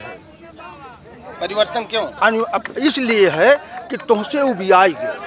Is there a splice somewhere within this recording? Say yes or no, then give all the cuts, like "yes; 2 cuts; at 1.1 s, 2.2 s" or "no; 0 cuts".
no; 0 cuts